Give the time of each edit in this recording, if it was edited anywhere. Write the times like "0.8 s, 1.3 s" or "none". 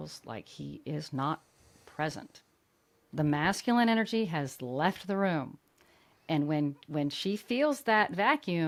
none